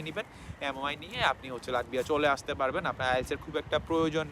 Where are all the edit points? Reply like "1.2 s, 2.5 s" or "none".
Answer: none